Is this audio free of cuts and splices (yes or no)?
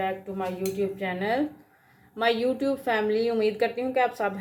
yes